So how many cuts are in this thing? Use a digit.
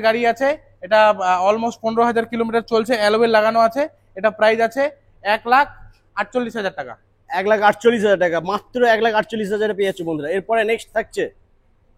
0